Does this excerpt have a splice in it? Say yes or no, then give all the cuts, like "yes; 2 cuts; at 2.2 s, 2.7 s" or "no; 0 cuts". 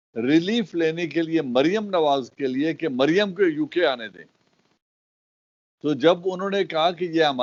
no; 0 cuts